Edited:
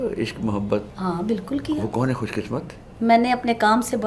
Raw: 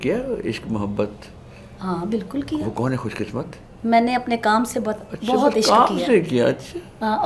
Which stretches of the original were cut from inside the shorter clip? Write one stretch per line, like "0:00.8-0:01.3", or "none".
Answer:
0:01.2-0:01.7